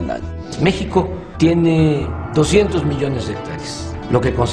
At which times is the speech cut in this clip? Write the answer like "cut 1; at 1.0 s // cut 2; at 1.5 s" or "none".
none